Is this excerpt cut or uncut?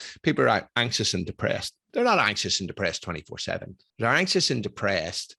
cut